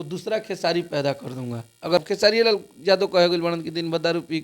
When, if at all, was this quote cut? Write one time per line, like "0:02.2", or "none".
0:02.0